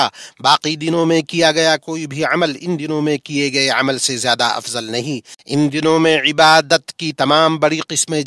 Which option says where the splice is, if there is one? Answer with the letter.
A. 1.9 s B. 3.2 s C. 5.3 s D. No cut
C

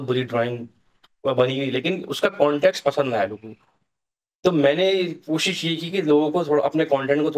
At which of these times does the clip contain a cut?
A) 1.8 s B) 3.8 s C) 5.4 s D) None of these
D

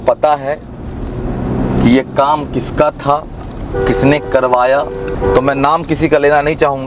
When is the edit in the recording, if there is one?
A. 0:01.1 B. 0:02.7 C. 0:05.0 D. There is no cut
C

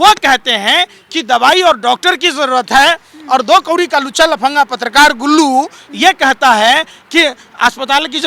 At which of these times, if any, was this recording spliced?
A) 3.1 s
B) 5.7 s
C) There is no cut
C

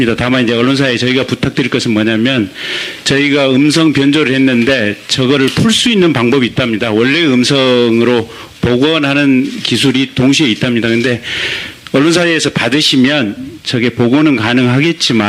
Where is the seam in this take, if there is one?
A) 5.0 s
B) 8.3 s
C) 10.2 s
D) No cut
B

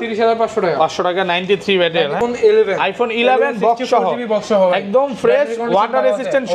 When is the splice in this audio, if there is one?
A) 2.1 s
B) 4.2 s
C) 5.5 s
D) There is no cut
A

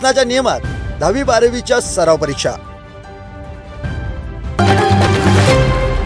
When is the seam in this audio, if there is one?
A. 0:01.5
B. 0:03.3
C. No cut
C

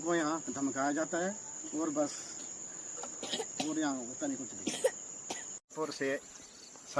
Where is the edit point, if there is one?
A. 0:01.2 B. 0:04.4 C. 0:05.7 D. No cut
C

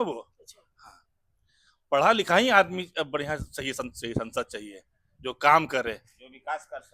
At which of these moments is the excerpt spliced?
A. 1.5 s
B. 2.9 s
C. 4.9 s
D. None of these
D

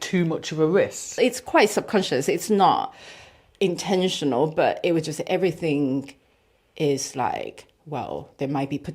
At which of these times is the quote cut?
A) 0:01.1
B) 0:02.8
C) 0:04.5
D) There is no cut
A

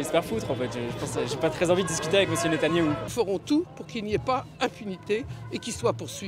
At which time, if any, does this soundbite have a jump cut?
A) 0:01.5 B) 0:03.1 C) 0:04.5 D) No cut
B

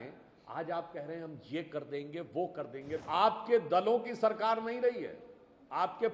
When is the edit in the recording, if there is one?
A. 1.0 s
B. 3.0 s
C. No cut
B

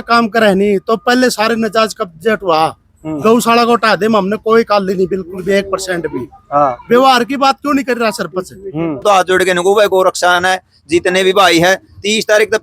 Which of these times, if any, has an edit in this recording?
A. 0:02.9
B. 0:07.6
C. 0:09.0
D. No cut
C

